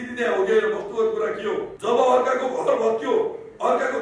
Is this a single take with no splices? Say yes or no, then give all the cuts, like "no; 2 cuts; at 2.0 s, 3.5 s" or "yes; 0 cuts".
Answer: no; 1 cut; at 1.7 s